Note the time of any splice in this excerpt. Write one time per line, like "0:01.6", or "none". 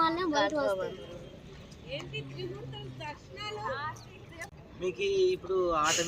0:04.5

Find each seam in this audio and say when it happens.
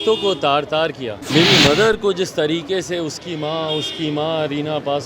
0:01.1

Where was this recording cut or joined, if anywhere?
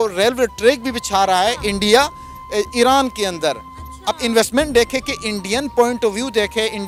none

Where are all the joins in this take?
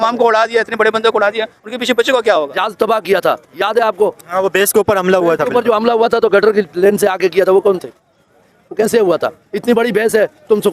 0:02.5

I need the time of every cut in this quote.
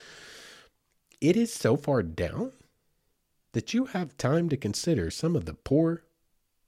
none

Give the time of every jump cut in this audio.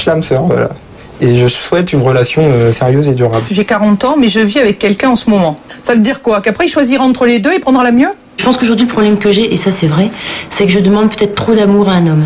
0:03.4
0:05.6
0:08.4

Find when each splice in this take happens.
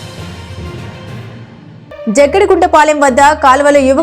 0:01.3

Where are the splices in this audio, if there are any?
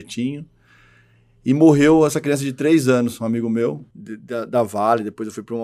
0:03.9

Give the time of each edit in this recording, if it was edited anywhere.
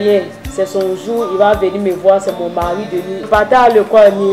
0:03.3

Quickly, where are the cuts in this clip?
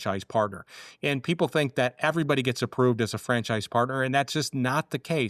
none

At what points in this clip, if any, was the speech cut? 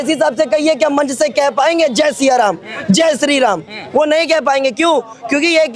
none

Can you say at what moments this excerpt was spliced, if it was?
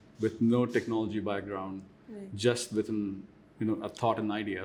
none

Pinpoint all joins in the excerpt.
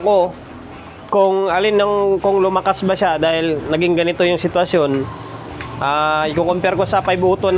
none

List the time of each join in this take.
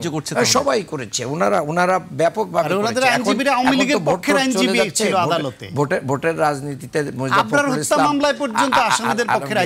none

